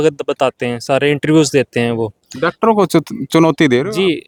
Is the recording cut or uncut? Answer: uncut